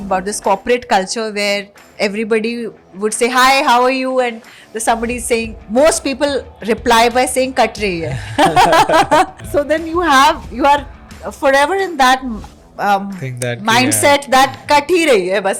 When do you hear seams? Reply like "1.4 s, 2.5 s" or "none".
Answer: 9.4 s